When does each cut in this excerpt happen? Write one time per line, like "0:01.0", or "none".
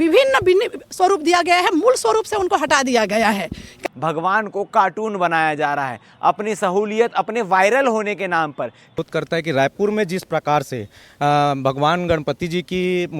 0:03.7
0:09.0